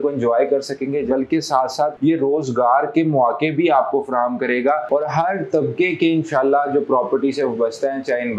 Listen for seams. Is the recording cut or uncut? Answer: cut